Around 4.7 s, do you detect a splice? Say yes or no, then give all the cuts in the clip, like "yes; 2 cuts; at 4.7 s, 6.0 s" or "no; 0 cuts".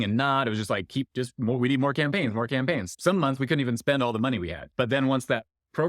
yes; 2 cuts; at 2.9 s, 4.7 s